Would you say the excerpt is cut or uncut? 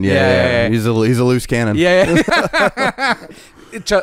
cut